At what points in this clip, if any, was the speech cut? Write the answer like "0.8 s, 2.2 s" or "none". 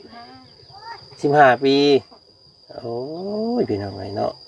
none